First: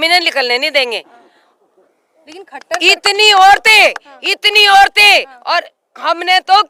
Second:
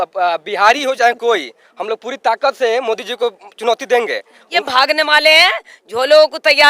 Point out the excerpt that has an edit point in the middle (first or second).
second